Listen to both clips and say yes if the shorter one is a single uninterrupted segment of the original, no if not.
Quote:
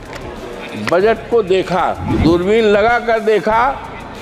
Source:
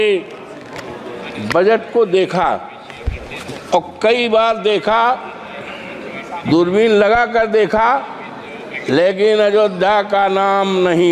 no